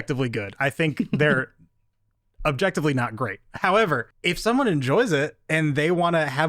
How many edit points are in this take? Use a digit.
1